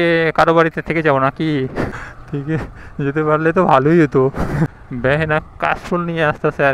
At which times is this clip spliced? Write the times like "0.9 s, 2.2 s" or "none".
1.9 s, 4.7 s